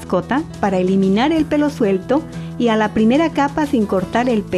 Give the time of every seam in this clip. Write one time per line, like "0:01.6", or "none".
0:02.4